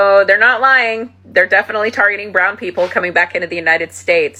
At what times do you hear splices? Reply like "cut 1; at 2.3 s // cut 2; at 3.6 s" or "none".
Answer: none